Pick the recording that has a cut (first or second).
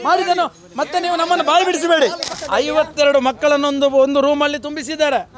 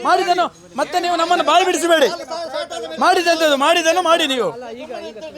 first